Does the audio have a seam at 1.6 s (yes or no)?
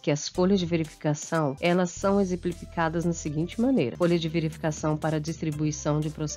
yes